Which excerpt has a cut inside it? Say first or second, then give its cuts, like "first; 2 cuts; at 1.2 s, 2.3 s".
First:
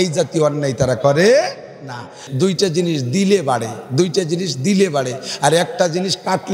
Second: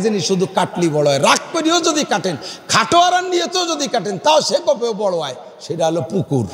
first; 1 cut; at 2.2 s